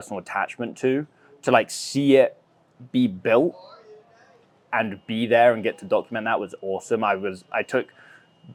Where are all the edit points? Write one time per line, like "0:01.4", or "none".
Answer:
none